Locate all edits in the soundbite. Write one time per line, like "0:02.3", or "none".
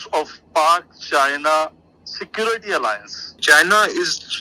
0:03.3